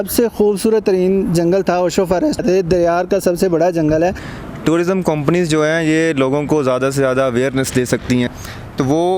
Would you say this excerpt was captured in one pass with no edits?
no; 3 cuts; at 2.4 s, 4.3 s, 8.3 s

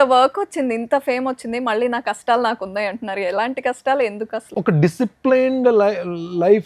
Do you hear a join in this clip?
yes; 1 cut; at 4.5 s

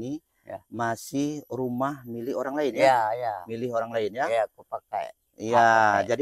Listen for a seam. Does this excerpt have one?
no; 0 cuts

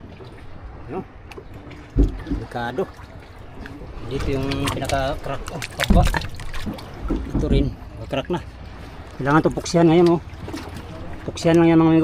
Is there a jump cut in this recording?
no; 0 cuts

